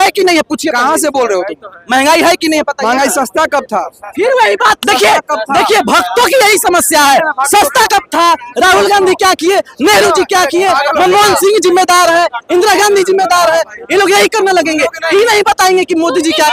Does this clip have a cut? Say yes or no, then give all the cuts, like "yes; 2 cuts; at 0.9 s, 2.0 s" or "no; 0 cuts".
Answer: no; 0 cuts